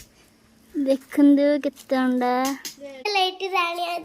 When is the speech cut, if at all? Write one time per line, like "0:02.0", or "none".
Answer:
0:03.1